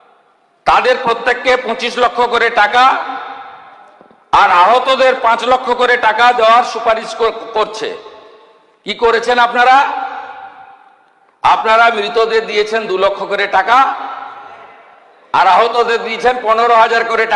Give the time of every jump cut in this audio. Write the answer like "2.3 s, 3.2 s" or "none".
none